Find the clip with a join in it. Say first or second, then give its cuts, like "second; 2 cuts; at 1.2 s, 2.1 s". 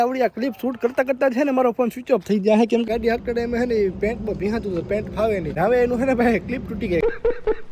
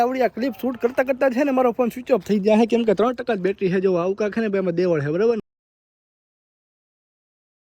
first; 3 cuts; at 2.8 s, 5.5 s, 7.0 s